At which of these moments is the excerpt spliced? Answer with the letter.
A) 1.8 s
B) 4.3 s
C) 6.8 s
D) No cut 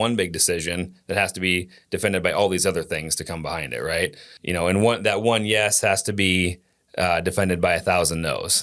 B